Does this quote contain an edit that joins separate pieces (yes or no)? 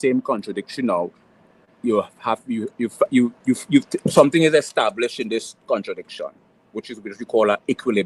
no